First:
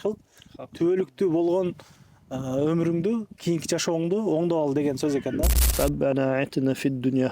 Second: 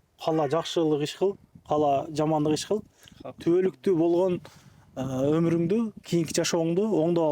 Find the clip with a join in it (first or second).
first